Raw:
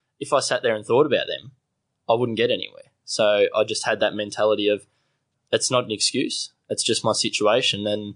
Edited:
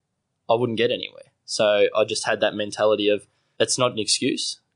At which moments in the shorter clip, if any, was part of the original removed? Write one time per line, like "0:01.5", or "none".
0:03.4